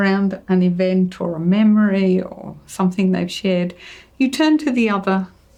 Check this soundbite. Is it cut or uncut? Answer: uncut